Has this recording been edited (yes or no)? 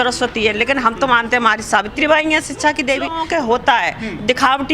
yes